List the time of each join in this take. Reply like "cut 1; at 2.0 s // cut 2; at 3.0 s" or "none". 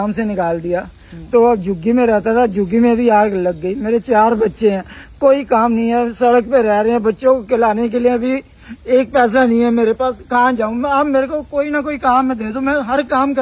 none